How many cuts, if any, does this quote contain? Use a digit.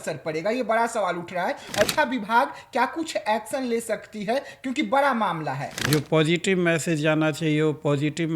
2